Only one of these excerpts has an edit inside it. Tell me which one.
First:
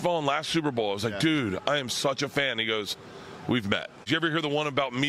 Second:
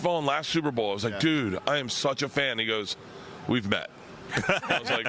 first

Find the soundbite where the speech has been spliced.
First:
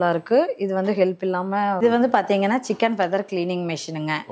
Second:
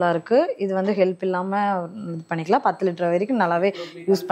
first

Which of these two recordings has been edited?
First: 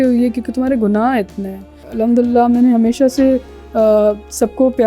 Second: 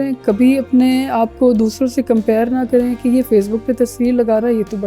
first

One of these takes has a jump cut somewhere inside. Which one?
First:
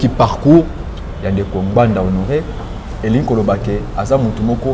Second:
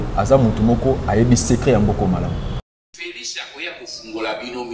second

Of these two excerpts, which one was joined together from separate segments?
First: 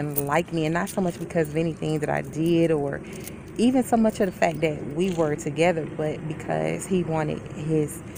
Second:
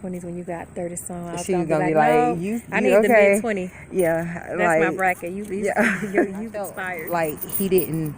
second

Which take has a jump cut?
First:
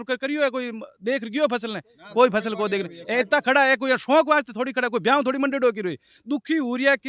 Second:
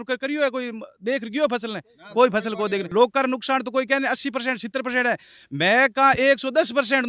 second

